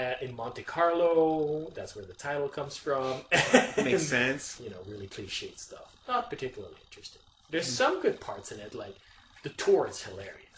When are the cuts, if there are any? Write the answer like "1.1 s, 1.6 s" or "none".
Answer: 6.2 s